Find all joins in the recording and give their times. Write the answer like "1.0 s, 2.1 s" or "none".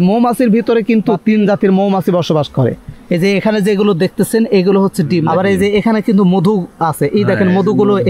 2.9 s, 5.2 s